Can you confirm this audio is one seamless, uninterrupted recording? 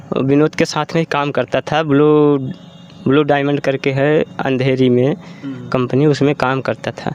yes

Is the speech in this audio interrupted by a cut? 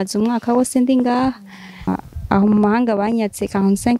yes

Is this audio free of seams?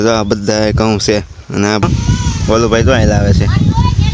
no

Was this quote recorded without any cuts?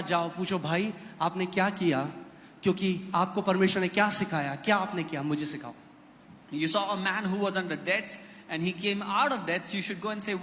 yes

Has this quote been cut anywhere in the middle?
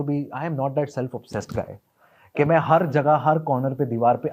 no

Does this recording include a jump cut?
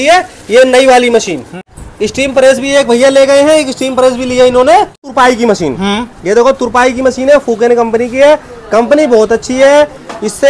yes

